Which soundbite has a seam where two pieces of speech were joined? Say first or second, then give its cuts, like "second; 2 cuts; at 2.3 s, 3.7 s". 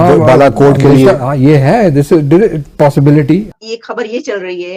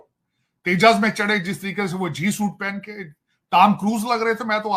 first; 1 cut; at 3.6 s